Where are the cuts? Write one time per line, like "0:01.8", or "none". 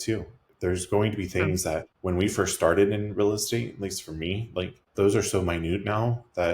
0:01.9
0:04.8